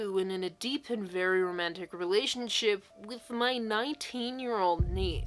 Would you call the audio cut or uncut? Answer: uncut